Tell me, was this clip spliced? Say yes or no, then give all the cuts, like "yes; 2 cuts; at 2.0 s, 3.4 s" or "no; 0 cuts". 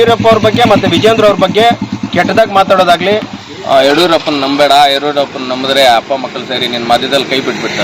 yes; 1 cut; at 3.3 s